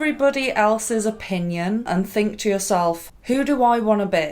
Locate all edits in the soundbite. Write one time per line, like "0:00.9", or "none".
0:01.9
0:03.1